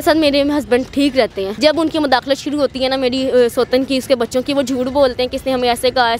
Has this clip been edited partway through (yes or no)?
yes